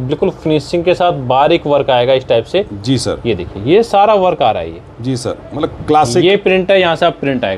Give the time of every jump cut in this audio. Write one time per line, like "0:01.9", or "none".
none